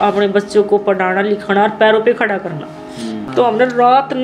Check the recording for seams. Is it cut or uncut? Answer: cut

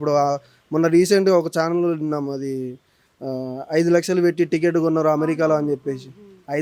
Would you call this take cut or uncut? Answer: uncut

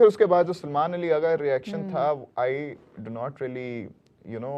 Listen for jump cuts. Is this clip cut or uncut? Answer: uncut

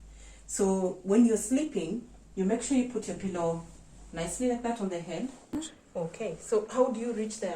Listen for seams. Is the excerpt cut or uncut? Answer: cut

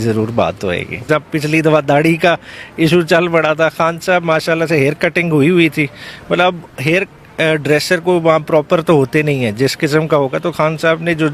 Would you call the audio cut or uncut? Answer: cut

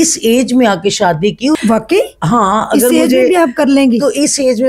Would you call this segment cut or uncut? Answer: cut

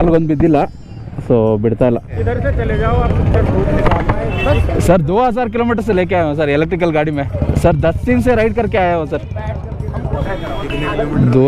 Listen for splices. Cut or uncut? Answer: cut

